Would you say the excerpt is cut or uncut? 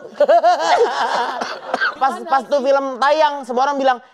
cut